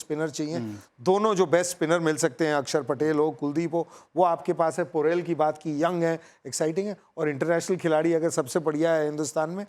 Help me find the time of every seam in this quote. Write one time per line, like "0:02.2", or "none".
none